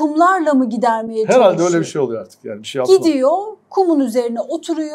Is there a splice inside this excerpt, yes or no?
no